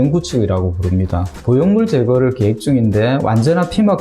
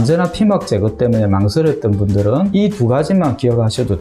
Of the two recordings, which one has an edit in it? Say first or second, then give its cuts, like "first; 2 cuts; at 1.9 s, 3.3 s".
first; 1 cut; at 1.4 s